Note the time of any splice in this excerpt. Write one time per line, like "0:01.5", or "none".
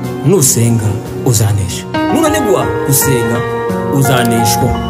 none